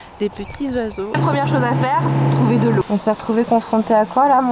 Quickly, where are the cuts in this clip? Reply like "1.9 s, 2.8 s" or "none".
1.2 s, 2.8 s